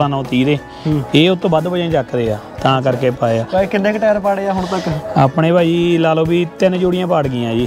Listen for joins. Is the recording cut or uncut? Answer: uncut